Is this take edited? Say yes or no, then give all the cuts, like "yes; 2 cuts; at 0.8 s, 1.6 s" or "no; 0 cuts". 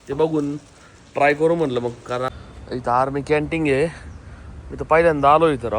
yes; 1 cut; at 2.4 s